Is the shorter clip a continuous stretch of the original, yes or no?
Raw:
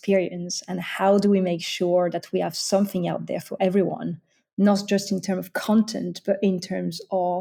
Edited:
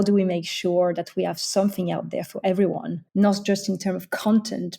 no